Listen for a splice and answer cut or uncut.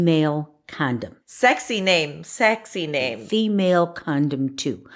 cut